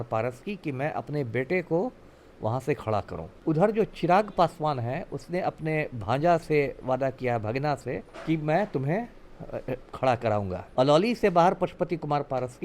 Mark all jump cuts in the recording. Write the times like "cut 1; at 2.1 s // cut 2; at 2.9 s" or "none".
cut 1; at 3.2 s // cut 2; at 8.1 s // cut 3; at 10.6 s